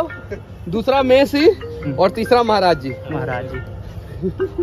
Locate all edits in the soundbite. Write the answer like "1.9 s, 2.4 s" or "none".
none